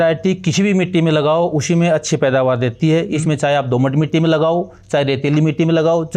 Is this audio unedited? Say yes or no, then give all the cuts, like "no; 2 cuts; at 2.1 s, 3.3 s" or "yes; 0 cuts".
yes; 0 cuts